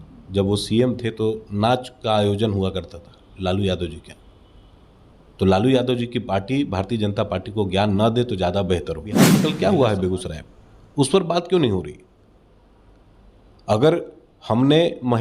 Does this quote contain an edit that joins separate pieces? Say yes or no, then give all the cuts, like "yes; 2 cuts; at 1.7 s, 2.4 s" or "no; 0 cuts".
yes; 1 cut; at 9.3 s